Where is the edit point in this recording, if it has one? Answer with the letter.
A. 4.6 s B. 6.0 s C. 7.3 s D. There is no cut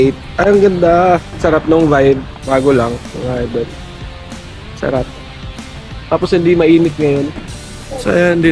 C